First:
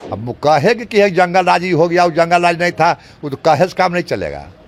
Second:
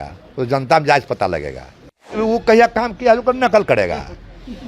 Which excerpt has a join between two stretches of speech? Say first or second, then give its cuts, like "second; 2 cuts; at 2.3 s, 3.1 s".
second; 1 cut; at 2.2 s